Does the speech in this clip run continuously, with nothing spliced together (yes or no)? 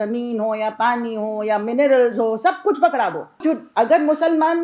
no